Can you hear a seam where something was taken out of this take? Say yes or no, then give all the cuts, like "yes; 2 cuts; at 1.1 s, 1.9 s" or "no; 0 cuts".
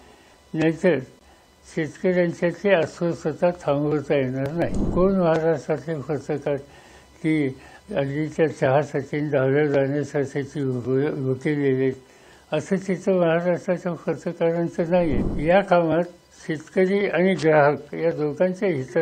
yes; 2 cuts; at 4.8 s, 15.3 s